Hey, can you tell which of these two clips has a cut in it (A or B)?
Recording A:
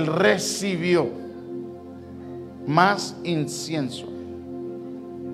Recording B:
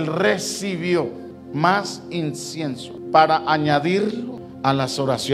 B